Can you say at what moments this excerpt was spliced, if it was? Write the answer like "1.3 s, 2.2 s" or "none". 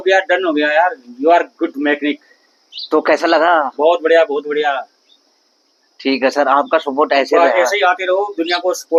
none